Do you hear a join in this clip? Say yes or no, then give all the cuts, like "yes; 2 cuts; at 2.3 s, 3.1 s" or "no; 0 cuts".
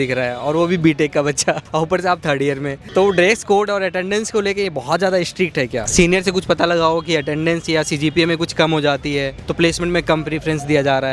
yes; 2 cuts; at 1.6 s, 5.8 s